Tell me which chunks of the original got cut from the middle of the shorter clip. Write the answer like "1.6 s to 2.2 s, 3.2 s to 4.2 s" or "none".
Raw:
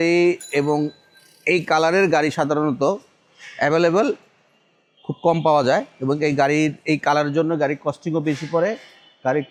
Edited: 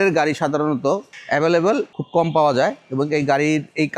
3.1 s to 3.4 s, 4.3 s to 5.1 s